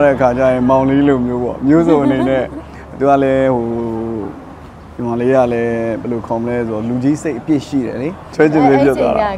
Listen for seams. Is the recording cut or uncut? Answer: cut